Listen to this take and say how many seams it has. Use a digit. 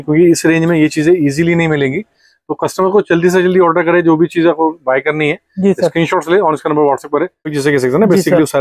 1